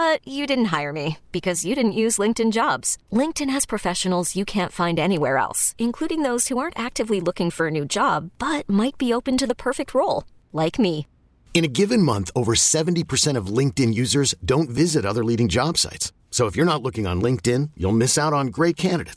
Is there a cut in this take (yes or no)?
no